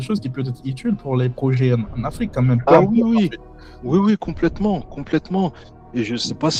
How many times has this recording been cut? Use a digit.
0